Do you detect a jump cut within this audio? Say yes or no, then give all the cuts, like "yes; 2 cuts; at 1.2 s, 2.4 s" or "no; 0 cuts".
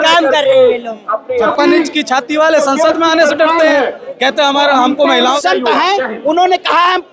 yes; 2 cuts; at 1.2 s, 5.4 s